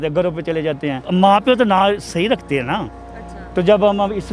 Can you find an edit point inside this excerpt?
yes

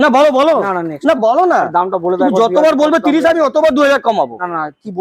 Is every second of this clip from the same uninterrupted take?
yes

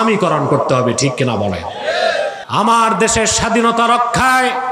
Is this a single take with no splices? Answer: no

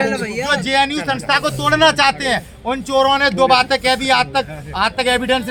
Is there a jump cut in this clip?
no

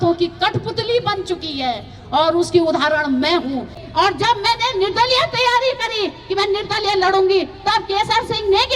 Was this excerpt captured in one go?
no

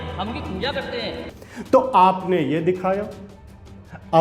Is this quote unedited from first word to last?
yes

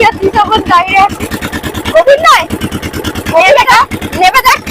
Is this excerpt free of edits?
yes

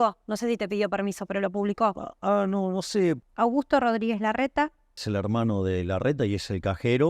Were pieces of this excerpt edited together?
yes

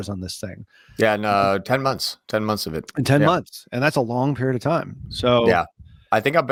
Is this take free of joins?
yes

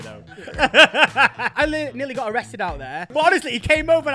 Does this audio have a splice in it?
yes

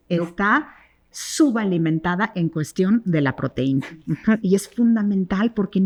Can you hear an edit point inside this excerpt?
no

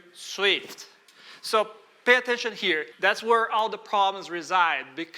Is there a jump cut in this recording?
yes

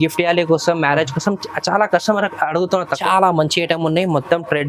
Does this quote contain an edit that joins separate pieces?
yes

